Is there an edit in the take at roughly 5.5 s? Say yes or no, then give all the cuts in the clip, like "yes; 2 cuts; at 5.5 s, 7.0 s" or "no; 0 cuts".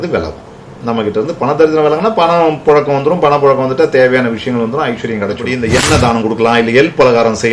yes; 1 cut; at 5.5 s